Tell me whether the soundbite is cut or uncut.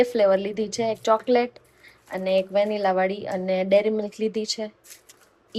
uncut